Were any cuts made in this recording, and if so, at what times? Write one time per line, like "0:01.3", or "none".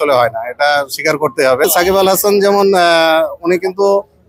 0:01.6